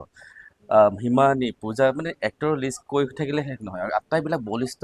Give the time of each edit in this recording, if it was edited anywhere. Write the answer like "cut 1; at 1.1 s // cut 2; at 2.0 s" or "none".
none